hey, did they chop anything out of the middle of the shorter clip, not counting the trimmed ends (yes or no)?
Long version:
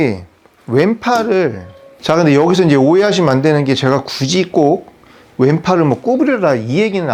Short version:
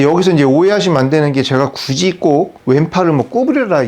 yes